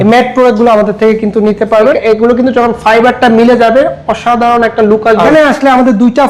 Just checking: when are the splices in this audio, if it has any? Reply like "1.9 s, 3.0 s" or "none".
1.9 s, 5.3 s